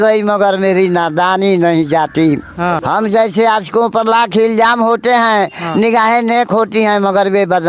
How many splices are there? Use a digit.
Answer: 1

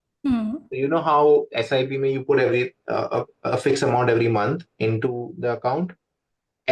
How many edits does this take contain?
0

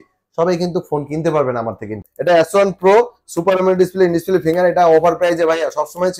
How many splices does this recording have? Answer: 1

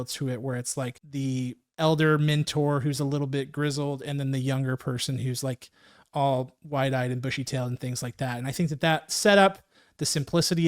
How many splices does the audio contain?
1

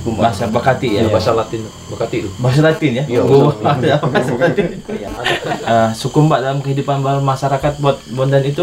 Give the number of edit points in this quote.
1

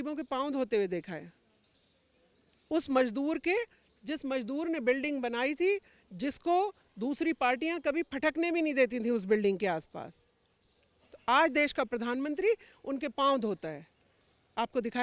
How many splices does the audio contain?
0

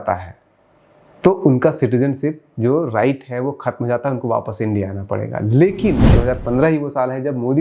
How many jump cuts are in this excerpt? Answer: 1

